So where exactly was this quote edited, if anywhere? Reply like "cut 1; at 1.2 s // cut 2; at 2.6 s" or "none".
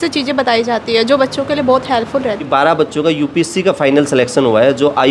cut 1; at 2.5 s